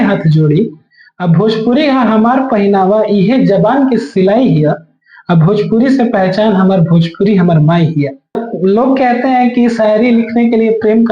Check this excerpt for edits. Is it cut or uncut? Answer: cut